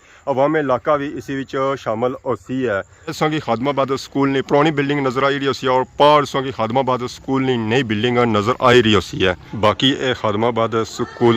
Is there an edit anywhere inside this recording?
yes; 2 cuts; at 3.2 s, 9.4 s

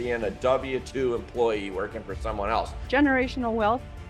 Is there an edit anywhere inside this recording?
yes; 1 cut; at 2.8 s

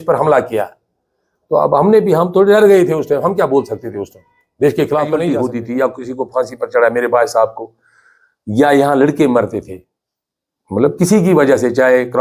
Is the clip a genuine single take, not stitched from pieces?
no; 1 cut; at 5.4 s

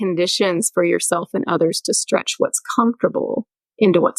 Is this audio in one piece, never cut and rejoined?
yes; 0 cuts

